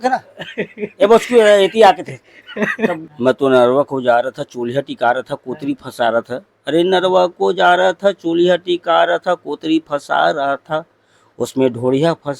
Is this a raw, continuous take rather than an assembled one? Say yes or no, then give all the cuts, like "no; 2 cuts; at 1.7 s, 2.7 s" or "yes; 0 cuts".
no; 1 cut; at 3.1 s